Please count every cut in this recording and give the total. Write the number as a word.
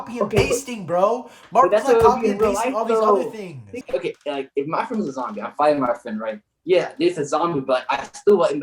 one